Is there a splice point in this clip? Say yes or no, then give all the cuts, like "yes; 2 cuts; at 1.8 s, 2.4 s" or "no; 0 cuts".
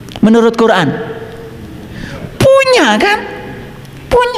no; 0 cuts